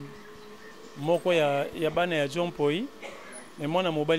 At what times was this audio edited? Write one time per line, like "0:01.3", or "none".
none